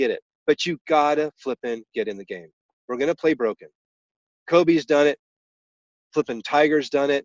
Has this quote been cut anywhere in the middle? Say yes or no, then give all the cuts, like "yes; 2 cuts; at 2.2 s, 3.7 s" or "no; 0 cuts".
no; 0 cuts